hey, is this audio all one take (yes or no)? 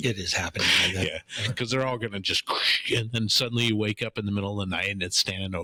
yes